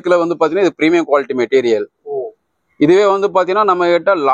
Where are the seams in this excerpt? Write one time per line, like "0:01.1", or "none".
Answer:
none